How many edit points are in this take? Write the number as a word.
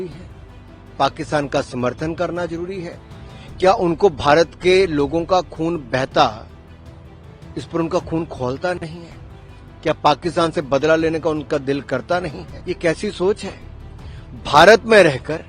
one